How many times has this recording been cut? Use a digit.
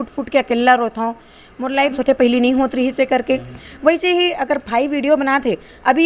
1